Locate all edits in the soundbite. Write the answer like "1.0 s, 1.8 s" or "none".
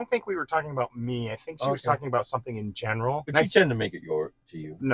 3.3 s